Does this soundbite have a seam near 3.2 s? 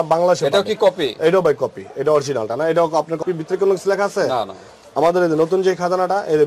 yes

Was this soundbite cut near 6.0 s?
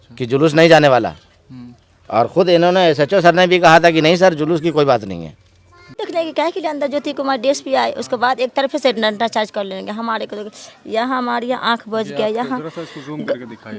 yes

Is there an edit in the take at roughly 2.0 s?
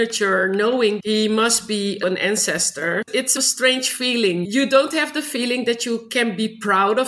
yes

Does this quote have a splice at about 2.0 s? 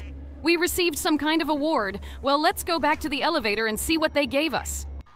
no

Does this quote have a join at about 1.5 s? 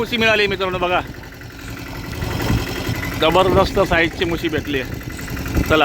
no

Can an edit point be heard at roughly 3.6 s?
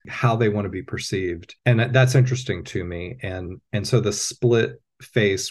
no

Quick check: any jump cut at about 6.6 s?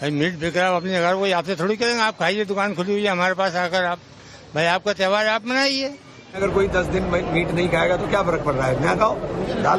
yes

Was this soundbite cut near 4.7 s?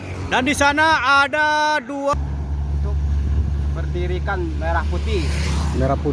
no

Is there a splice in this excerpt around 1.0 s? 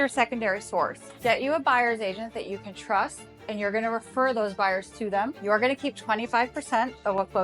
yes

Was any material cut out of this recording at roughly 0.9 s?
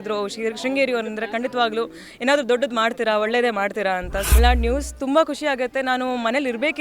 no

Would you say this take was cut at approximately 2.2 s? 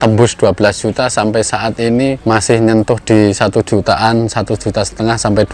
yes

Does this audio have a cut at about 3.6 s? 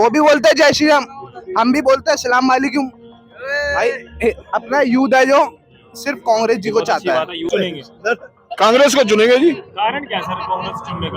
no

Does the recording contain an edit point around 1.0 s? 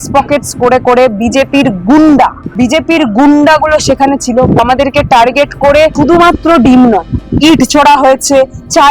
no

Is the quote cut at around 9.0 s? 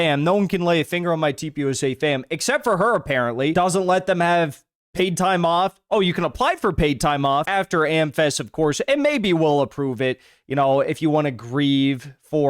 no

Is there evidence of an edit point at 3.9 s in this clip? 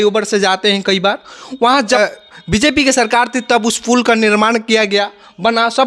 no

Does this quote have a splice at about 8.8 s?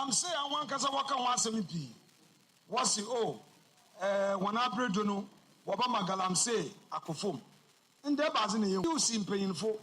yes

